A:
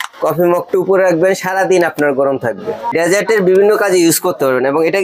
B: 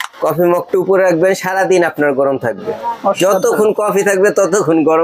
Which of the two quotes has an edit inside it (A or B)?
A